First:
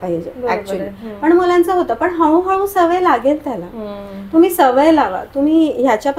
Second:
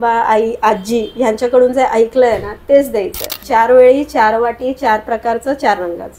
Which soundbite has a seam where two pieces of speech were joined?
second; 1 cut; at 3.4 s

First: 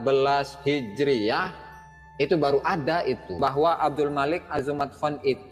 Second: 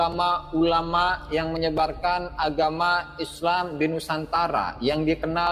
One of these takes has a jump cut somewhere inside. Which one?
first; 1 cut; at 3.3 s

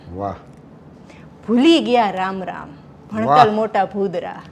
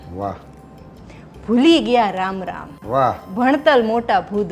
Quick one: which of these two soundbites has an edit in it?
second; 1 cut; at 2.8 s

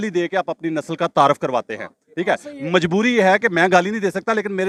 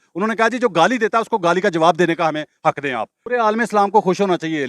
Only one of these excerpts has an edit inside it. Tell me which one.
second; 1 cut; at 3.2 s

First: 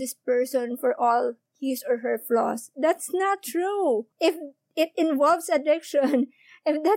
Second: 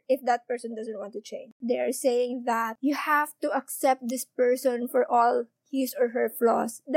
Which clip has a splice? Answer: second; 1 cut; at 1.6 s

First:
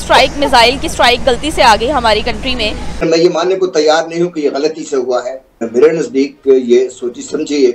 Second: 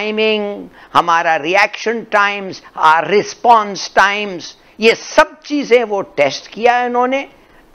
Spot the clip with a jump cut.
first; 1 cut; at 2.9 s

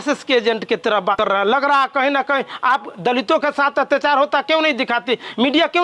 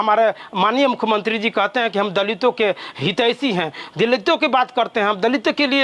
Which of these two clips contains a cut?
first; 1 cut; at 1.2 s

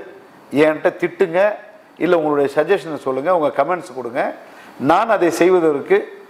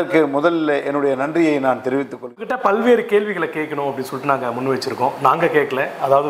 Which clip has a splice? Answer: second; 1 cut; at 2.5 s

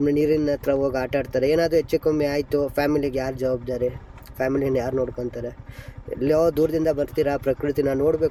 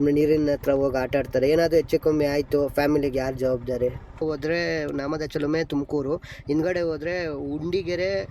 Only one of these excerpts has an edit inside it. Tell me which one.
second; 1 cut; at 4.2 s

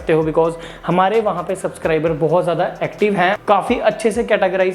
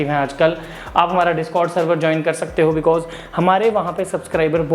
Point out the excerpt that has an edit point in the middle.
first; 1 cut; at 3.4 s

